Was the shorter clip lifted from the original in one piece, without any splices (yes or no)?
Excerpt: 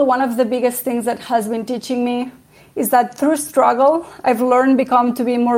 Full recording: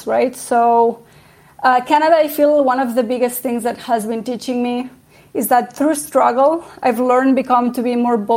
yes